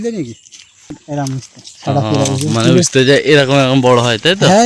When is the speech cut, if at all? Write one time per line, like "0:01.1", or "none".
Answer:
0:01.0